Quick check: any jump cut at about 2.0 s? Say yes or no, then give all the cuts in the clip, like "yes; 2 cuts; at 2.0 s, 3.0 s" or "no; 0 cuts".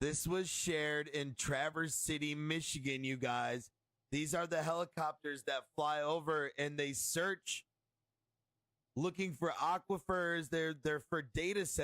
yes; 1 cut; at 2.0 s